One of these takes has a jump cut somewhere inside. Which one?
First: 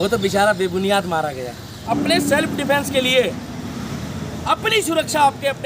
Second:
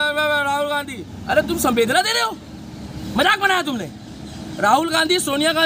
first; 1 cut; at 1.9 s

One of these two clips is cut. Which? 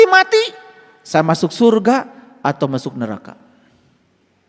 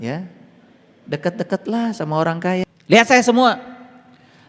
second; 1 cut; at 2.6 s

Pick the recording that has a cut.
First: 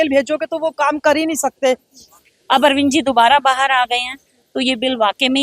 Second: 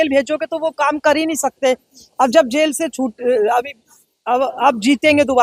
first; 1 cut; at 2.0 s

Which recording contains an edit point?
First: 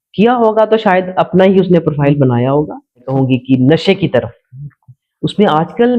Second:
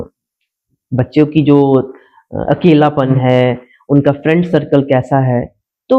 first; 1 cut; at 3.1 s

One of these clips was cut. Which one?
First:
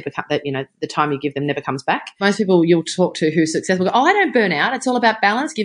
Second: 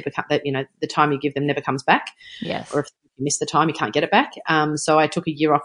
first; 1 cut; at 2.2 s

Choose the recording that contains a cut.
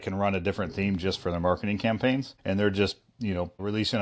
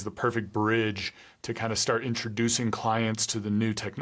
first; 1 cut; at 2.3 s

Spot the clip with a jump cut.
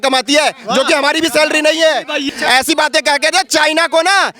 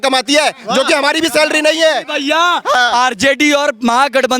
first; 1 cut; at 2.2 s

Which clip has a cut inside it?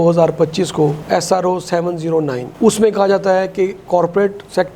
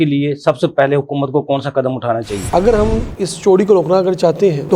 second; 1 cut; at 2.4 s

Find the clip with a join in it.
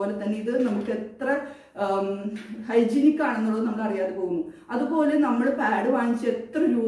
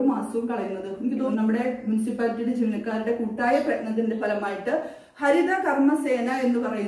second; 1 cut; at 1.3 s

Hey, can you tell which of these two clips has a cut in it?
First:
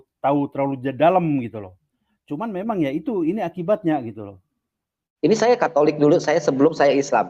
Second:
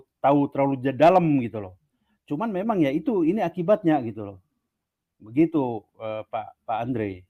first; 1 cut; at 5.0 s

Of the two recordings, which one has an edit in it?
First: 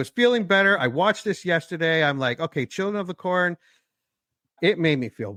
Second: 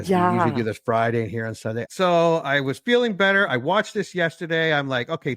second; 1 cut; at 1.8 s

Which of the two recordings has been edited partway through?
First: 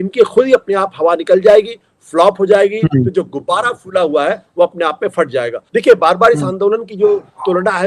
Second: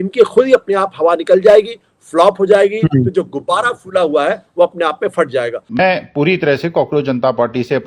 second; 1 cut; at 5.6 s

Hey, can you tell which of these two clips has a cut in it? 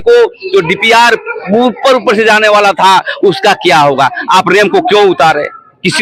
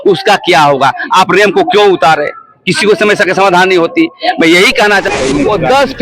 second; 1 cut; at 5.1 s

